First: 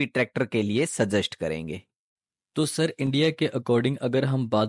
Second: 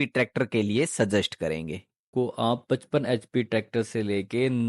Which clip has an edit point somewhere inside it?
second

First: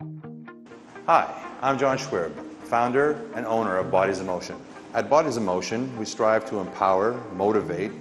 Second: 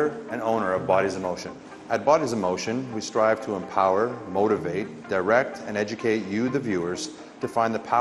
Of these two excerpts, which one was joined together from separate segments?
second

